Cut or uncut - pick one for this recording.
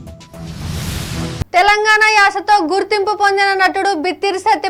uncut